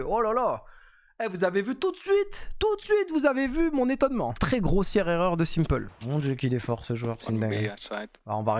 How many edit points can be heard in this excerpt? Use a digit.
2